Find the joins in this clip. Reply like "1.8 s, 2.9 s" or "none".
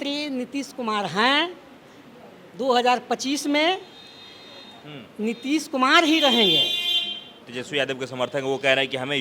7.5 s